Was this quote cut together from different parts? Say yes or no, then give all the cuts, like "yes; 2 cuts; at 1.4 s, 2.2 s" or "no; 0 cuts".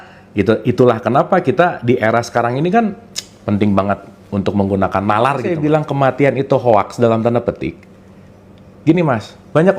yes; 1 cut; at 5.6 s